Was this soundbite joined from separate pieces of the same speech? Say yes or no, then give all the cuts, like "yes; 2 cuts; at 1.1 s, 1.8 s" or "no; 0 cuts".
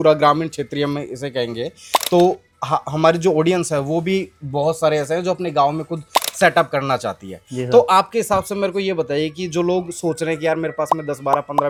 no; 0 cuts